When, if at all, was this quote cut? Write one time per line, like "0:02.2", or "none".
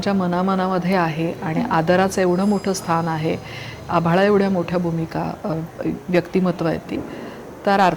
none